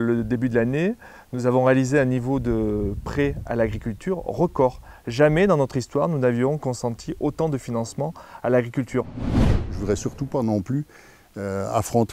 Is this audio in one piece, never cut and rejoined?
no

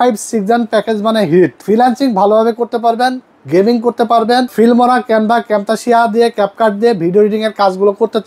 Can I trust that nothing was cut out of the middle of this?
no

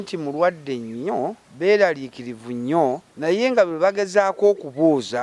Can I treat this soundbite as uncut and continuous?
no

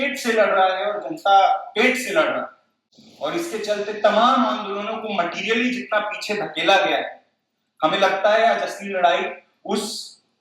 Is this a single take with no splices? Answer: yes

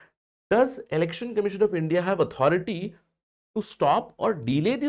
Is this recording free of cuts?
yes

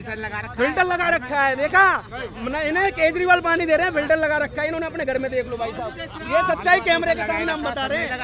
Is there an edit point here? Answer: no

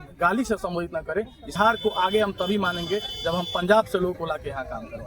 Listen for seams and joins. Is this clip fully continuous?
no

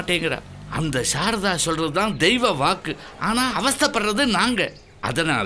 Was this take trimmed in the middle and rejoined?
no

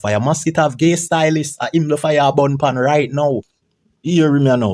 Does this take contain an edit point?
yes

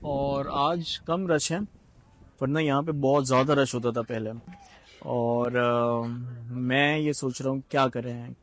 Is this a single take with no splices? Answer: yes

